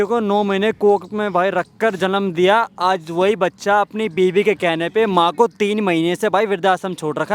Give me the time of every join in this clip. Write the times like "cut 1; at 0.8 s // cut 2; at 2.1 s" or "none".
none